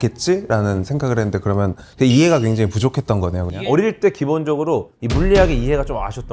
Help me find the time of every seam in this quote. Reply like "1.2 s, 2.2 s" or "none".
1.8 s, 3.5 s